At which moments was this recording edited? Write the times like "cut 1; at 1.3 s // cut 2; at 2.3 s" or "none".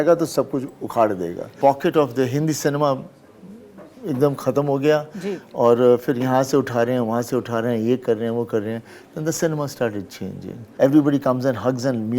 cut 1; at 1.5 s // cut 2; at 10.7 s